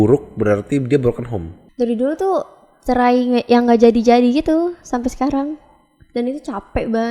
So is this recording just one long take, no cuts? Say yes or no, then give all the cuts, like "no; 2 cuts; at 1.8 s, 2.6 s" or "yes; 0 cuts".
no; 1 cut; at 1.6 s